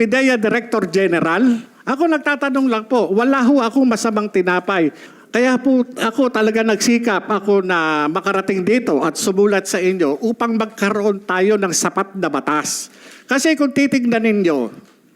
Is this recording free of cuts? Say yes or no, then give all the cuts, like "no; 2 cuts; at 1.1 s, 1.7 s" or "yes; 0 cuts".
no; 1 cut; at 5.1 s